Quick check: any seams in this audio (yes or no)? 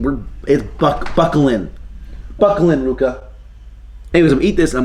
no